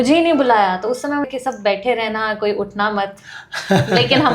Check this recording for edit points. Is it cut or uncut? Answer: cut